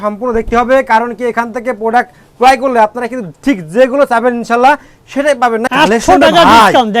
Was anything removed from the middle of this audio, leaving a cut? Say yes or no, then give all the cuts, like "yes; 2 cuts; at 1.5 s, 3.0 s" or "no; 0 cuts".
yes; 1 cut; at 5.7 s